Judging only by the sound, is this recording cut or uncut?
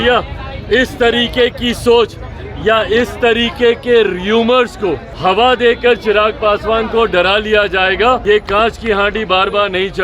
cut